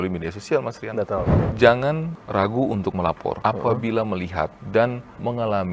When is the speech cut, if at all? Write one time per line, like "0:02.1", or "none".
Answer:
0:01.4
0:03.4
0:04.6